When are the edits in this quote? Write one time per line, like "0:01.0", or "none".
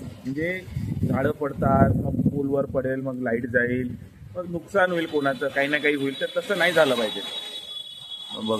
none